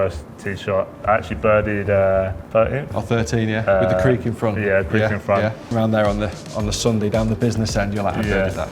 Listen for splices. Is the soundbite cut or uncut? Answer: cut